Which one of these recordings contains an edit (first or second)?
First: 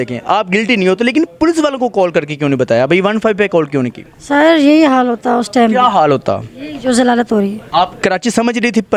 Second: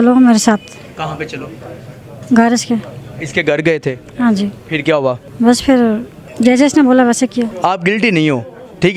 second